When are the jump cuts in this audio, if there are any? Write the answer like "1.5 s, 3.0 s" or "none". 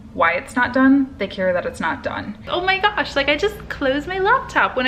2.5 s